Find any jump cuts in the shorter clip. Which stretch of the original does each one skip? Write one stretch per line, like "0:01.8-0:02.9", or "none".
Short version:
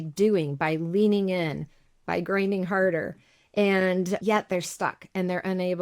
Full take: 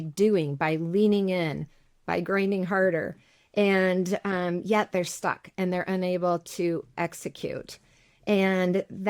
0:04.2-0:04.6